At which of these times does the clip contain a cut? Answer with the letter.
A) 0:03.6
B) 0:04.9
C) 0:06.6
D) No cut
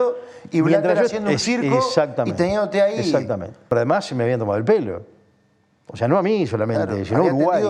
A